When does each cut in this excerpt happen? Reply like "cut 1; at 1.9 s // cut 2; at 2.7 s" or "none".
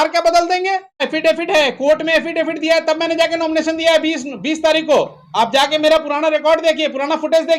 cut 1; at 1.1 s